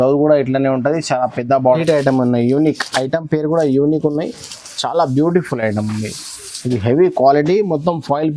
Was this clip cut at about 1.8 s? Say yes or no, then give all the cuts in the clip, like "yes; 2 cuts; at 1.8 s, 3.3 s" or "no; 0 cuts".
yes; 1 cut; at 1.8 s